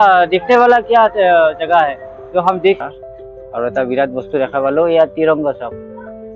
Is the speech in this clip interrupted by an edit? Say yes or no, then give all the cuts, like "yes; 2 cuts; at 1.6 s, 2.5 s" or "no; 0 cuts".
yes; 1 cut; at 2.8 s